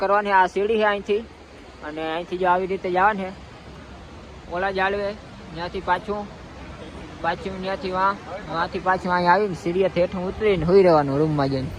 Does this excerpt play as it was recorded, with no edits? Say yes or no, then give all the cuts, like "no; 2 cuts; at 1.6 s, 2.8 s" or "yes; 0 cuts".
yes; 0 cuts